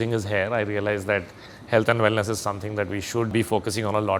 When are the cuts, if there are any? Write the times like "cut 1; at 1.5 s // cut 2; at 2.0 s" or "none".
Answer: cut 1; at 3.3 s